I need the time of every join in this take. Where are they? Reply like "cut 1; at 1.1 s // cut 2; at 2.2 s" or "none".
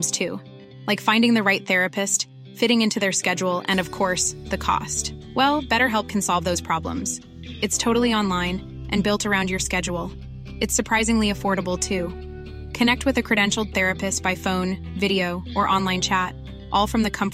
none